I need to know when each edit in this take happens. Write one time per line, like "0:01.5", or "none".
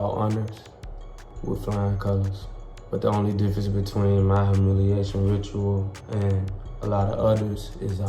0:02.4